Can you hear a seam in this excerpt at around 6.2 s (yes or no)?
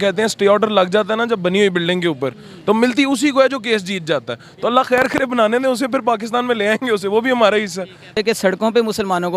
no